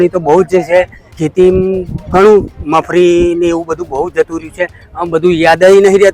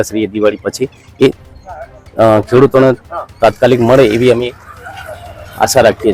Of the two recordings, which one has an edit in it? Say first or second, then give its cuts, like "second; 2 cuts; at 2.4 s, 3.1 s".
first; 1 cut; at 1.1 s